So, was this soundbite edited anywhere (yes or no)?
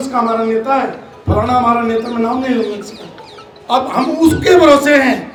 no